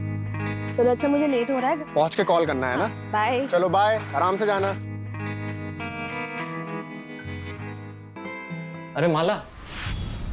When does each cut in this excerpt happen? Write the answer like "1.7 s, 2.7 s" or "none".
8.1 s